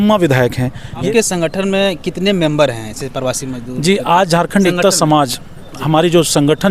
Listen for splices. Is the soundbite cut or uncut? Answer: cut